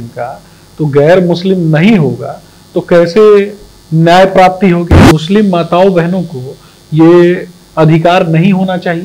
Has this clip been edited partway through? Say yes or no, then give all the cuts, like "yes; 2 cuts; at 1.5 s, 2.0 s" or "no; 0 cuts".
yes; 1 cut; at 5.1 s